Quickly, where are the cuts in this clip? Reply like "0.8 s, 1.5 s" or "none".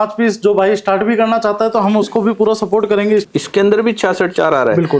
3.3 s